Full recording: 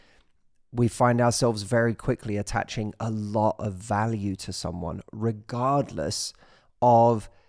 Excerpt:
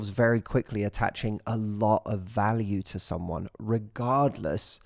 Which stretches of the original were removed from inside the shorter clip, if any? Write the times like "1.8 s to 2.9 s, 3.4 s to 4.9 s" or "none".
none